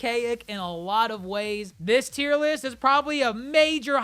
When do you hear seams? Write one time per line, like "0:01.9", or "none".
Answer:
0:01.7